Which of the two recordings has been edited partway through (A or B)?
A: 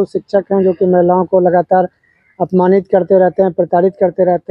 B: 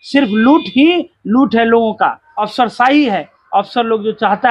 B